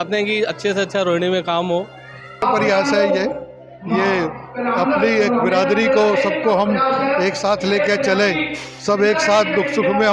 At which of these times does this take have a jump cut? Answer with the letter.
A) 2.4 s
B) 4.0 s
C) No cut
A